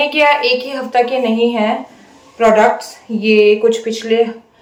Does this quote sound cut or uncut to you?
uncut